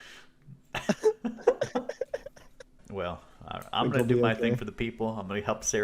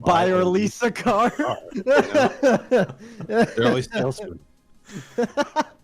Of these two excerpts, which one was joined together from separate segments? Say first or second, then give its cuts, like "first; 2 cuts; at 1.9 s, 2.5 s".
first; 1 cut; at 2.8 s